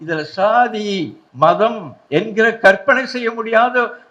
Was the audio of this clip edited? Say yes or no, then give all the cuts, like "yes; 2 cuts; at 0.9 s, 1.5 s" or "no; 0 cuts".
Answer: yes; 2 cuts; at 1.2 s, 1.9 s